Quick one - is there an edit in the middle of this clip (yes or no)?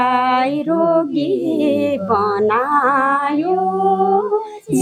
no